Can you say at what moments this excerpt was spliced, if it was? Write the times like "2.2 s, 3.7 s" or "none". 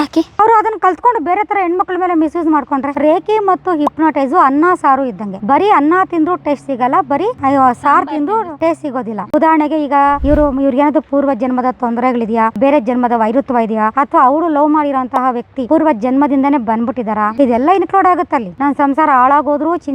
2.9 s, 9.2 s, 18.5 s